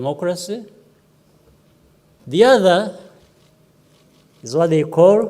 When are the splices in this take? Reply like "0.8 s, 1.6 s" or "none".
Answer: 2.2 s